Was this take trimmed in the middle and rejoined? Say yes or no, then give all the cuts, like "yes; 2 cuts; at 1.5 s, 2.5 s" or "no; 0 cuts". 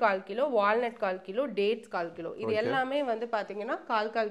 no; 0 cuts